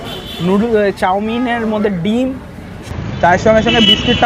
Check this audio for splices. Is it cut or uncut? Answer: cut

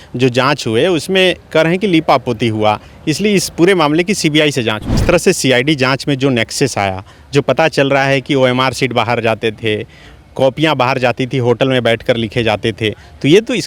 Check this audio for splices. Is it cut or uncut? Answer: cut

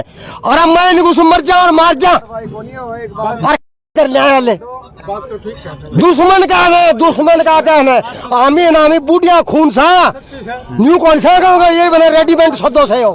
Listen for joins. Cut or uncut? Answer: uncut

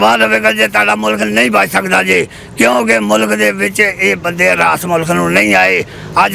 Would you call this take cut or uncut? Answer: uncut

